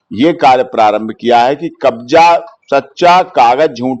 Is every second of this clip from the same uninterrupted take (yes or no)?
yes